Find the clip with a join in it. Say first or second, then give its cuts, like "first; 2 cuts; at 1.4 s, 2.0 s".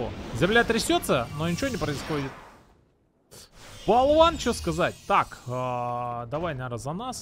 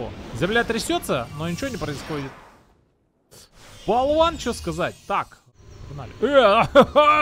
second; 1 cut; at 5.4 s